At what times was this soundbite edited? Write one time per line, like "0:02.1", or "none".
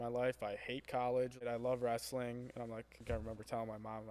0:01.4
0:03.0